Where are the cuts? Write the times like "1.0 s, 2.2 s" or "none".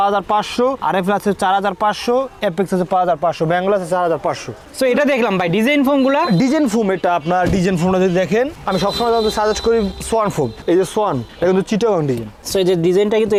none